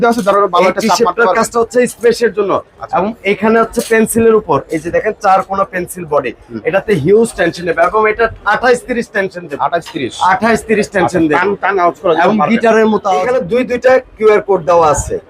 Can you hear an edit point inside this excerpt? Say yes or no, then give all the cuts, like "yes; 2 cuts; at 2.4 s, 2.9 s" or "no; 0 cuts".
yes; 1 cut; at 13.2 s